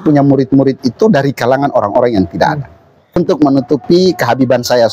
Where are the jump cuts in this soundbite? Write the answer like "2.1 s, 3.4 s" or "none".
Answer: 3.2 s